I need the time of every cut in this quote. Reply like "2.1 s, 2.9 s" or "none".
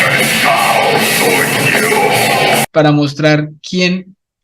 2.7 s

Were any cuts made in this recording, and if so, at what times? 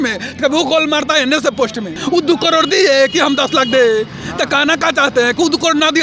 2.0 s

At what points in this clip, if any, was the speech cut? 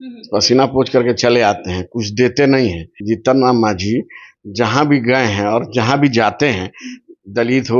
2.9 s

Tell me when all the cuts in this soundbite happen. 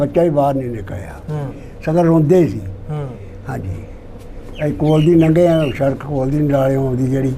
none

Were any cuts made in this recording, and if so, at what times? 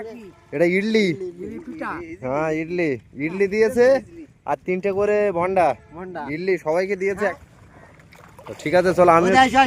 none

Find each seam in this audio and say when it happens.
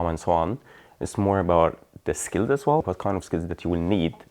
2.8 s

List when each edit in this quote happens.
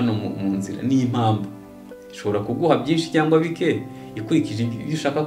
none

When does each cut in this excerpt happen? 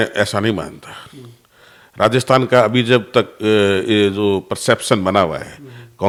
none

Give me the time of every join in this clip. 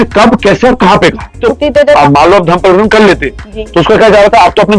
1.5 s

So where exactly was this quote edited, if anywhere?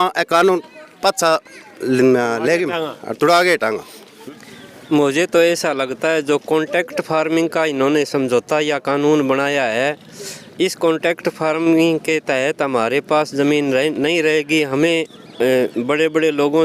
4.2 s

